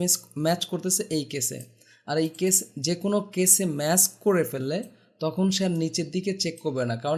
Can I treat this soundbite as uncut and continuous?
yes; 0 cuts

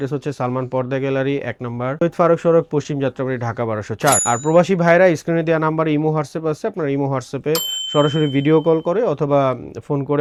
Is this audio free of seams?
yes; 0 cuts

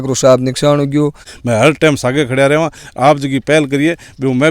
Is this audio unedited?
no; 1 cut; at 1.3 s

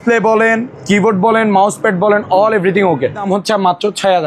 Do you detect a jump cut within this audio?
yes; 1 cut; at 3.2 s

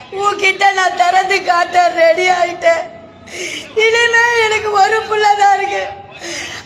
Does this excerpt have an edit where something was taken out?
no; 0 cuts

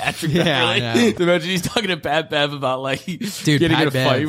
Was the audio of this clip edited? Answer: yes; 1 cut; at 1.2 s

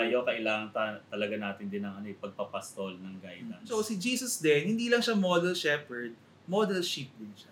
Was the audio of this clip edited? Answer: yes; 1 cut; at 3.7 s

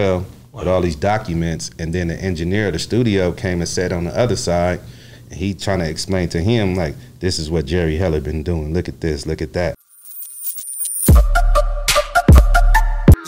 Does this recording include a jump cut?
yes; 1 cut; at 9.9 s

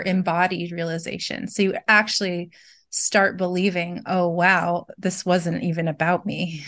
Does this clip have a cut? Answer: no; 0 cuts

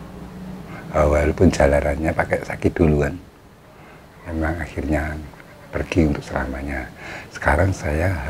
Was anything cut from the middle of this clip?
no; 0 cuts

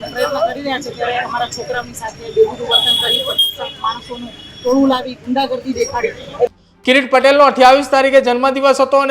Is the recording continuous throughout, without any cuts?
no; 1 cut; at 6.5 s

